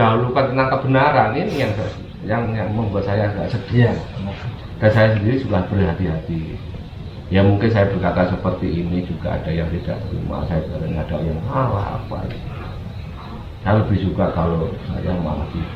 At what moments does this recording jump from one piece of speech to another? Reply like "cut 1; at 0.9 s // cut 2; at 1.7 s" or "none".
none